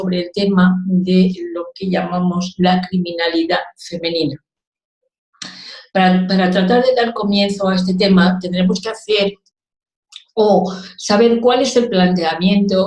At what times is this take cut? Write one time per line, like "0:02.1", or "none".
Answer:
0:06.8